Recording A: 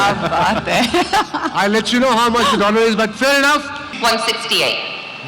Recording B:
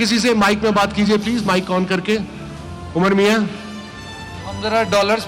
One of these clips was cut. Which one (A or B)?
A